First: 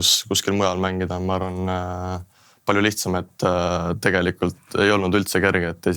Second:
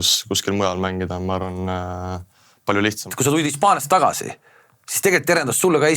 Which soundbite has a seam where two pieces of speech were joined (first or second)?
second